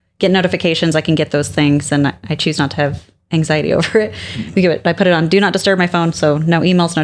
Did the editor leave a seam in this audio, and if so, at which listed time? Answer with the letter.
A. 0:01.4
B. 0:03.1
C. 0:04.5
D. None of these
D